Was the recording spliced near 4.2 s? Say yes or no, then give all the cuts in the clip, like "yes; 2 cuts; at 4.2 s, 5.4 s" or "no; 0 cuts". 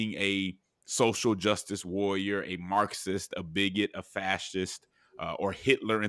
no; 0 cuts